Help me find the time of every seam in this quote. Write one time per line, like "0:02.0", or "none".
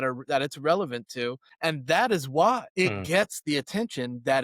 0:01.5
0:02.7